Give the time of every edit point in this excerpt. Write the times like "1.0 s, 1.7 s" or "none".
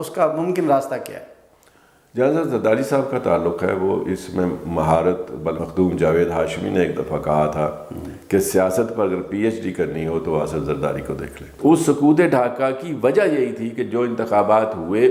5.6 s, 11.5 s